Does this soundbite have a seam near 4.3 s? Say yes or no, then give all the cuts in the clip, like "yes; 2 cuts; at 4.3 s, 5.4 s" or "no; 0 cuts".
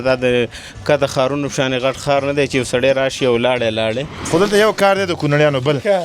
yes; 1 cut; at 4.3 s